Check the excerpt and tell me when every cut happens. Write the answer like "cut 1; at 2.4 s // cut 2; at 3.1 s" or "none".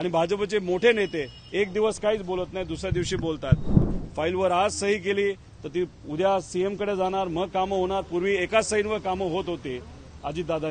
cut 1; at 3.8 s